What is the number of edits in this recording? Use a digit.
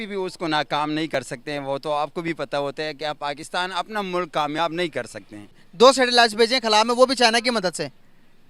1